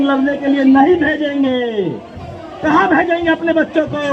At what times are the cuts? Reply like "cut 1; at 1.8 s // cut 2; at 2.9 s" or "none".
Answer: none